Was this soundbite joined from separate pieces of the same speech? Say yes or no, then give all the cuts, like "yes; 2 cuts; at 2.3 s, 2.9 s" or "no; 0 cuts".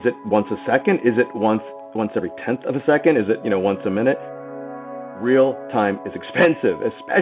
yes; 1 cut; at 4.7 s